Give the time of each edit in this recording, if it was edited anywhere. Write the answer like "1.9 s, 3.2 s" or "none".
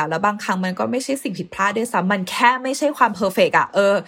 none